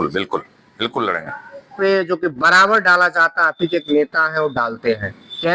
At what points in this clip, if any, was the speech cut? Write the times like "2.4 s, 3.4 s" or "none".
1.7 s

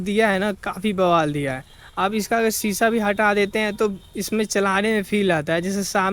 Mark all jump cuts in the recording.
none

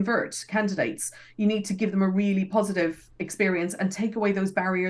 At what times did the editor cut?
none

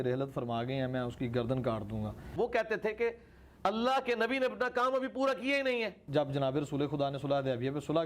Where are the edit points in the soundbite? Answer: 2.2 s, 6.0 s

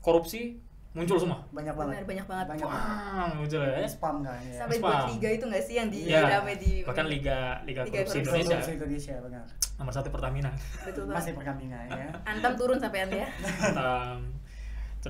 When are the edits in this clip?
none

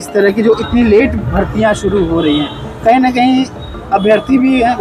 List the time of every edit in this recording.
none

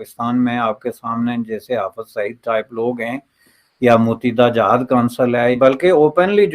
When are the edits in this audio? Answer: 5.6 s

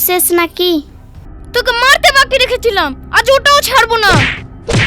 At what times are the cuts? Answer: 1.3 s

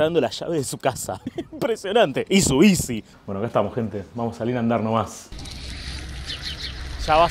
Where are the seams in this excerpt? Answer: none

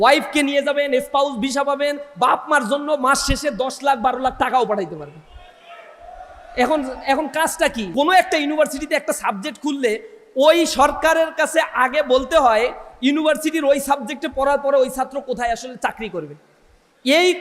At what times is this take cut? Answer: 7.8 s

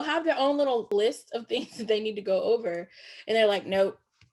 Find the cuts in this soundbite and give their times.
0.9 s

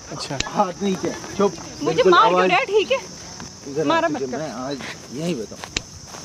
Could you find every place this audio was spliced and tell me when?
none

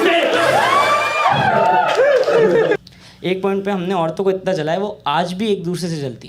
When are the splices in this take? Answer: 2.8 s

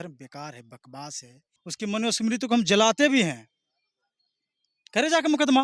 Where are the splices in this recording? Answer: 1.7 s

